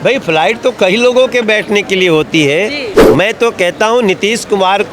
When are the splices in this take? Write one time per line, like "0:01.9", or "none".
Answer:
0:02.9